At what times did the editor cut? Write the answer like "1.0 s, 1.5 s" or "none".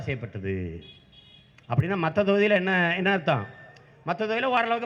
none